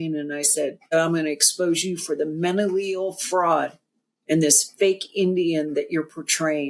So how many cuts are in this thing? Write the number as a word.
one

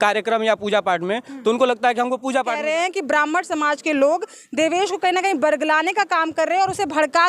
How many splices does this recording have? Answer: one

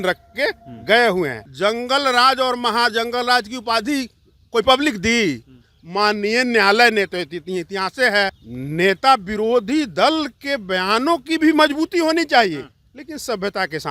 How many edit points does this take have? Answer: two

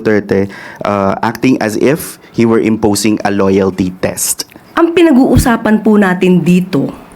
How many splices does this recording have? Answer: one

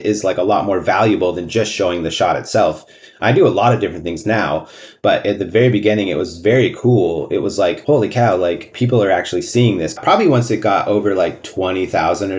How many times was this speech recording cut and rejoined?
four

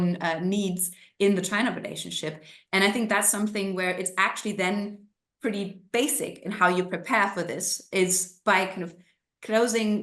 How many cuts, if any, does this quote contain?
zero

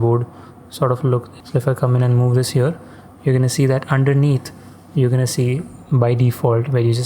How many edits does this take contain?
one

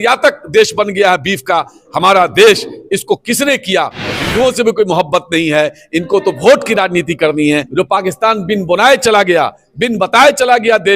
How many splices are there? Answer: two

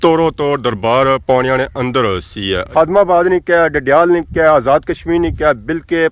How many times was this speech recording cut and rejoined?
one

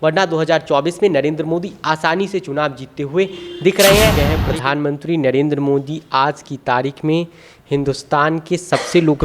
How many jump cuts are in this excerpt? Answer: one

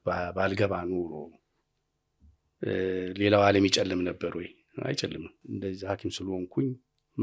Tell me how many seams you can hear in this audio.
one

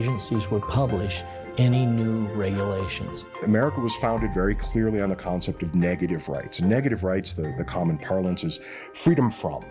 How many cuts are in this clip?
one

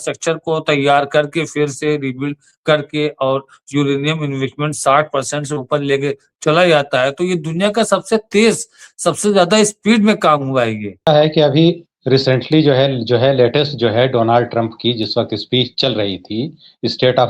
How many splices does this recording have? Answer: one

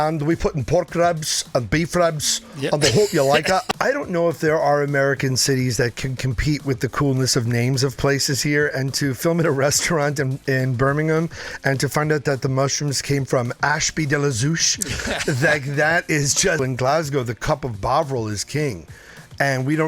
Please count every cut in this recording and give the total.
two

